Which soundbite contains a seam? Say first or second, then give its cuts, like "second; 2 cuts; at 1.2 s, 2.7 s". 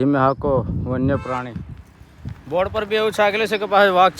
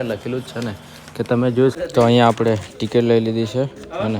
second; 1 cut; at 1.7 s